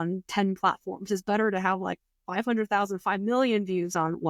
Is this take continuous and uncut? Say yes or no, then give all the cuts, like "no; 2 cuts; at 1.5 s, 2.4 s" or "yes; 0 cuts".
yes; 0 cuts